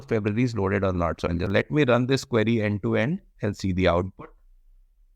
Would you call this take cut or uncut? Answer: cut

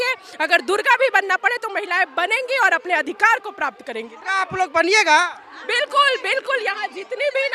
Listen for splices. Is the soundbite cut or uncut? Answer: uncut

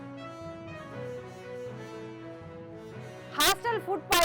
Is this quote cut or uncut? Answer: cut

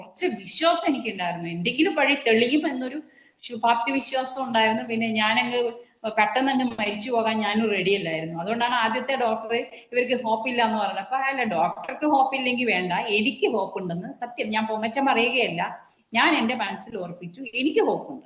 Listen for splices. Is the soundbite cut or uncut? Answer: uncut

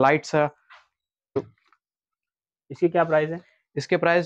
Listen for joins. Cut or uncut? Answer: cut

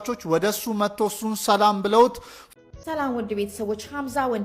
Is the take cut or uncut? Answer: cut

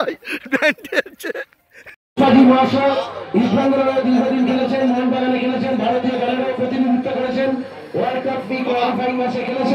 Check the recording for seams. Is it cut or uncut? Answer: cut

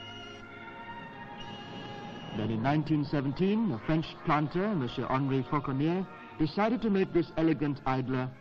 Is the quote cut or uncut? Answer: uncut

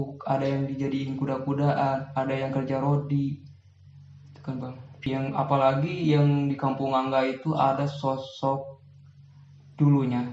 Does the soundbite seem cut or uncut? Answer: cut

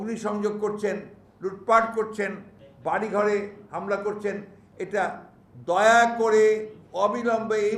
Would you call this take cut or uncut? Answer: uncut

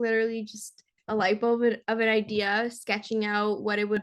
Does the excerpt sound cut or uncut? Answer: uncut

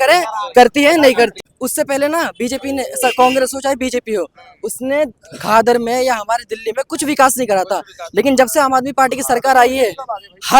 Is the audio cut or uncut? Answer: cut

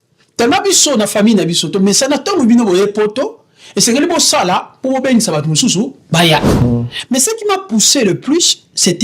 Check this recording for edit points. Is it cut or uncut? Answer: cut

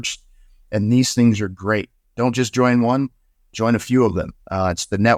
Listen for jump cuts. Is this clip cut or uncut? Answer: uncut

